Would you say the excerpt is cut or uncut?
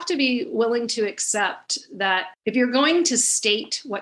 cut